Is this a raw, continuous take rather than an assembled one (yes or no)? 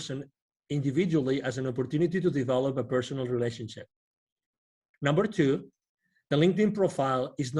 no